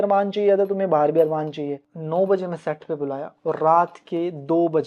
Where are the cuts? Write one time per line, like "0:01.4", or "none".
0:01.9